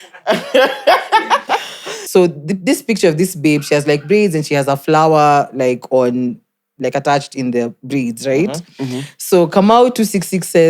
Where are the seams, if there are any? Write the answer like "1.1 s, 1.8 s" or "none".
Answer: 1.9 s